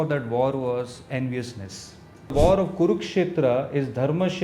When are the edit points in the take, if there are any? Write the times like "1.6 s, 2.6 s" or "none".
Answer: 2.3 s